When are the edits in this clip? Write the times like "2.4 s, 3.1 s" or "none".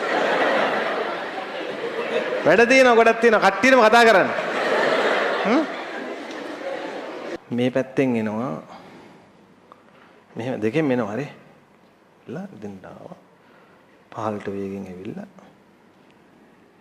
7.4 s